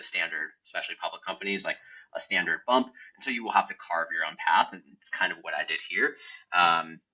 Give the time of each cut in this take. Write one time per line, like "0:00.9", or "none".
none

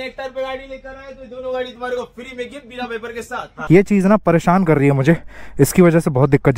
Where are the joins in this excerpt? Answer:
0:03.5

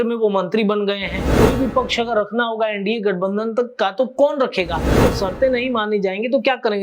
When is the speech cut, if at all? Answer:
0:01.2
0:05.0

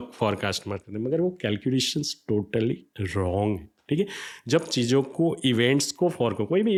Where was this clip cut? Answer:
none

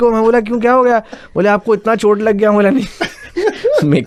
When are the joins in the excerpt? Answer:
none

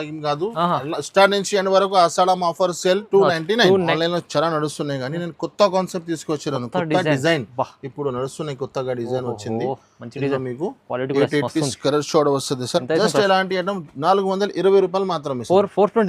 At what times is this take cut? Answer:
0:03.9
0:12.8

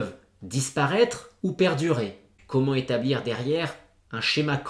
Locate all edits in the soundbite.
0:02.4

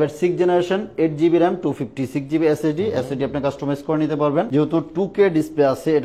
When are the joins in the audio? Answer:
0:04.5

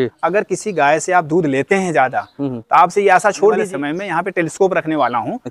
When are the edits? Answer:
0:03.6

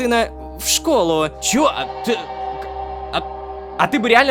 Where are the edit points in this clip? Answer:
0:01.4

